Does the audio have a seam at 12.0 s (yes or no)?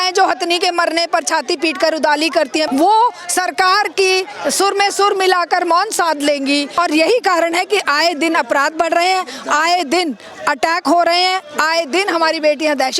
no